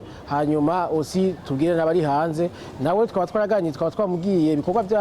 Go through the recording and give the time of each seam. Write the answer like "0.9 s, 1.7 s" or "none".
none